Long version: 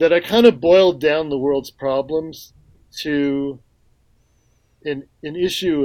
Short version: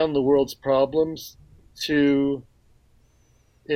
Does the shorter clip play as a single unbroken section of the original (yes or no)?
yes